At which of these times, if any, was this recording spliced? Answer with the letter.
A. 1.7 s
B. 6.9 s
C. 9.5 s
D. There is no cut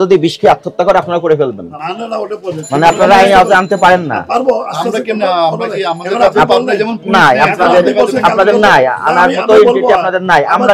A